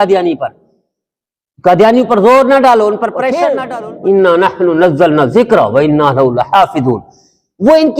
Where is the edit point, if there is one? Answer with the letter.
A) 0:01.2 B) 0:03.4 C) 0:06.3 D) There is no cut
B